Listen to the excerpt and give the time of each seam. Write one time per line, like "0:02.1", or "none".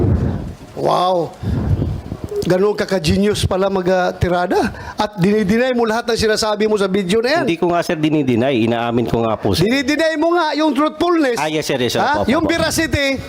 none